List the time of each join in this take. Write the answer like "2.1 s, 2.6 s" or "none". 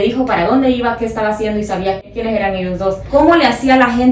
2.1 s, 3.0 s